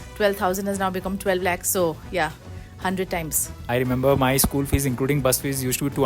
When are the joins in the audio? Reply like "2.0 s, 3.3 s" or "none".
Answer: 3.6 s